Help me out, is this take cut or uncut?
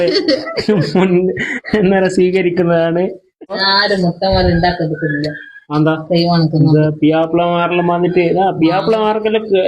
cut